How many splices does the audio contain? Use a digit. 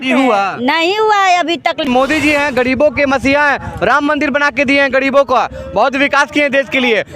1